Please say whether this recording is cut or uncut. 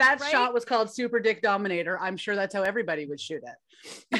uncut